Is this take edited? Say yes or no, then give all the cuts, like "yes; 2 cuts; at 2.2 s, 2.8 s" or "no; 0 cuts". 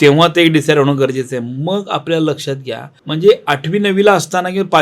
yes; 1 cut; at 2.9 s